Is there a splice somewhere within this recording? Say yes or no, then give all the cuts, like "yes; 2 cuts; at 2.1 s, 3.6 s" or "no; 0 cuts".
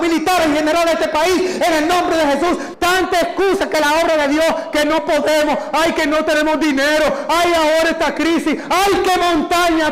yes; 1 cut; at 2.7 s